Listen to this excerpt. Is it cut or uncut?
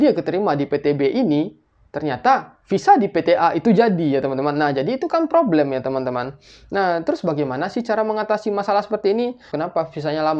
cut